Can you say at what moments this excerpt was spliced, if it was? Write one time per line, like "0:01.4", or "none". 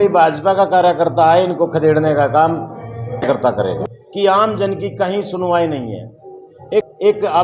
0:03.5
0:06.6